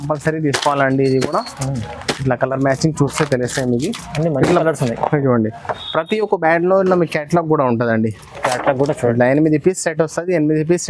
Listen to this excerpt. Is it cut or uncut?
uncut